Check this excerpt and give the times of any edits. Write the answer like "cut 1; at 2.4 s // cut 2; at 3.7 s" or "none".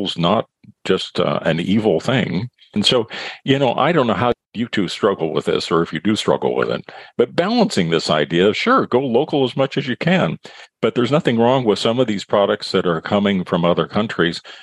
cut 1; at 2.8 s // cut 2; at 4.4 s

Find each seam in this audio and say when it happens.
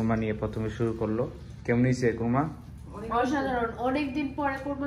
none

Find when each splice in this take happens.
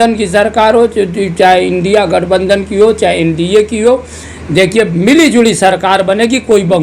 none

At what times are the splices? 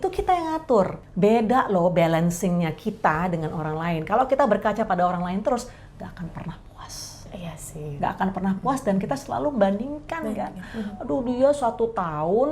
cut 1; at 1.0 s

